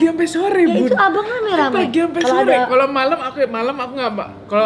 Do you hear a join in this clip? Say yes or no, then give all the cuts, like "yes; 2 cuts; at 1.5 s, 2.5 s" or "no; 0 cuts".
no; 0 cuts